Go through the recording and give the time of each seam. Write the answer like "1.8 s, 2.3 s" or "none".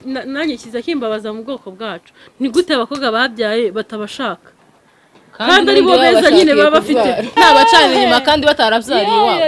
7.4 s